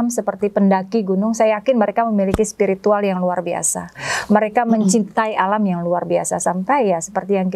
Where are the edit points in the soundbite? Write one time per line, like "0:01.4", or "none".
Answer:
none